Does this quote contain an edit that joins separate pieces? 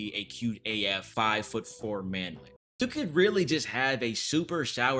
yes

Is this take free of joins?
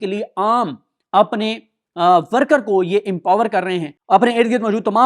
no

